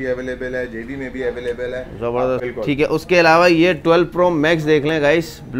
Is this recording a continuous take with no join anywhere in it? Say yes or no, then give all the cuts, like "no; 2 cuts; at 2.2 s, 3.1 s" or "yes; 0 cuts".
no; 1 cut; at 2.5 s